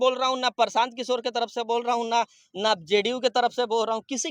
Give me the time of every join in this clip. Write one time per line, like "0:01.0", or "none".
none